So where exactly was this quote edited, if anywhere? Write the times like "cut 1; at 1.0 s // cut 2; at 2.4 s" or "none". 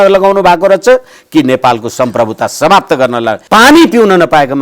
cut 1; at 3.4 s